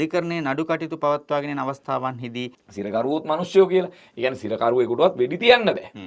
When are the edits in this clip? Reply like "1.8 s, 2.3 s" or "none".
2.6 s